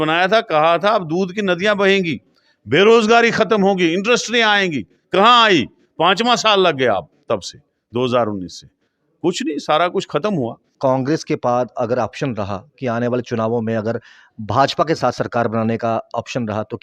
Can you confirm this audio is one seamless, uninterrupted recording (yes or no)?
no